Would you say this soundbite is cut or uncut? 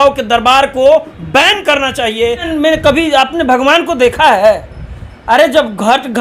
cut